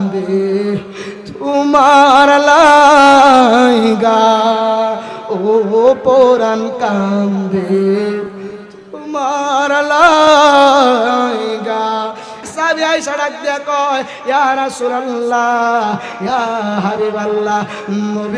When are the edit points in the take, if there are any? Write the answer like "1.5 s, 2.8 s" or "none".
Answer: 12.5 s